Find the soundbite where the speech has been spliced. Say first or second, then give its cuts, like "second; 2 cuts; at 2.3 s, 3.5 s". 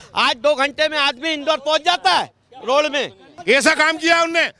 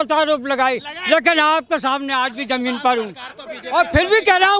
first; 1 cut; at 3.3 s